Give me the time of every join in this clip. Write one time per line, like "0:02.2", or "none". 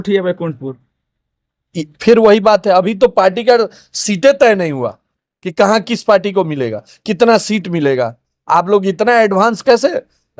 none